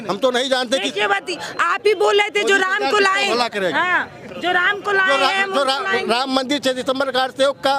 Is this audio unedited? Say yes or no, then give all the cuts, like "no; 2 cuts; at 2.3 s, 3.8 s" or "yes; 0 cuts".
yes; 0 cuts